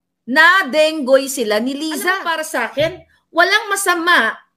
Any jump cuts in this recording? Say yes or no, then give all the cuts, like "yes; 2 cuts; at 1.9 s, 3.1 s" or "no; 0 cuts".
yes; 1 cut; at 2.3 s